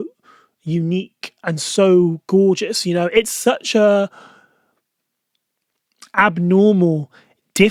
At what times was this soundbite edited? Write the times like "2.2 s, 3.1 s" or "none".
none